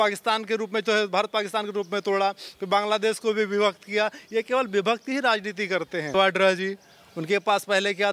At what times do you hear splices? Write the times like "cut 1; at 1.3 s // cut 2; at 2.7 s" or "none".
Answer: cut 1; at 6.1 s